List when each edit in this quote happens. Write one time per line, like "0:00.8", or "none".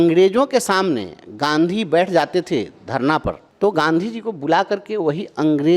0:03.5